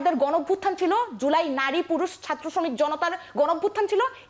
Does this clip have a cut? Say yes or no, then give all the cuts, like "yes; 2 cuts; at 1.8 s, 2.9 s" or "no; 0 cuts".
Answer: no; 0 cuts